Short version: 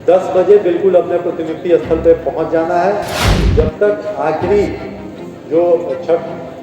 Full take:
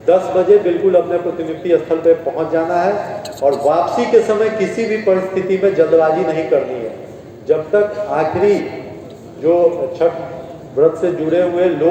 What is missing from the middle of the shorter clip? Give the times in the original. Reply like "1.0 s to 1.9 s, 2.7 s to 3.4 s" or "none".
3.2 s to 7.1 s